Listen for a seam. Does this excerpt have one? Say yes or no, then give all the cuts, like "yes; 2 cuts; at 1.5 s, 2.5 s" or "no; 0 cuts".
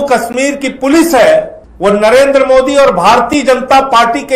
yes; 1 cut; at 1.6 s